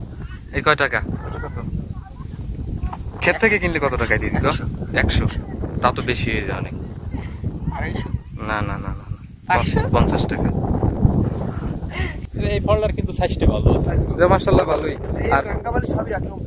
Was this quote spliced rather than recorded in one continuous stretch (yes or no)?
yes